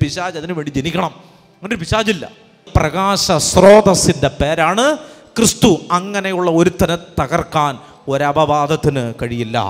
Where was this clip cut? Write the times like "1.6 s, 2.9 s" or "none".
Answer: 2.7 s